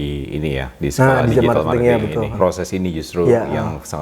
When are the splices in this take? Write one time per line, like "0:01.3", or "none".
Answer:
0:02.4